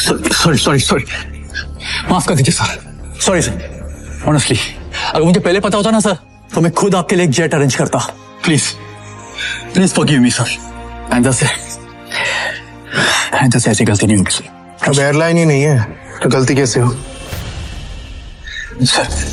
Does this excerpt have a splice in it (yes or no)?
no